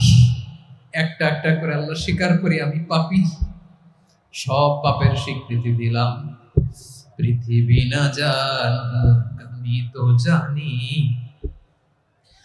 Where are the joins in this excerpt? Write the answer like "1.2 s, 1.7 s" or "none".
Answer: none